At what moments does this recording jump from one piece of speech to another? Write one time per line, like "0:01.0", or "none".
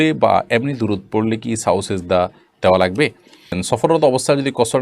0:03.6